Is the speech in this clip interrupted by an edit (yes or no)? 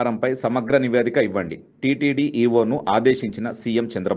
no